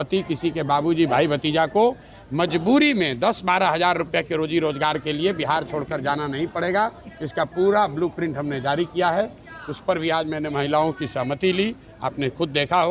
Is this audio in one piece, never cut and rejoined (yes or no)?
yes